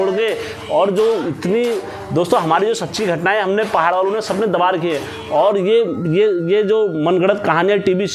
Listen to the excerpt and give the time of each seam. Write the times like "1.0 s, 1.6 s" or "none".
none